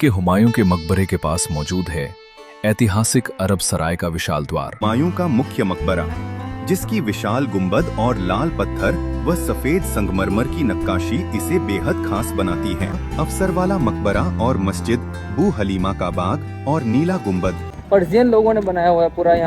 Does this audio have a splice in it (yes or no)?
yes